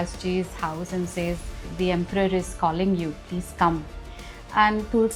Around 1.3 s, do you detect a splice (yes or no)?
no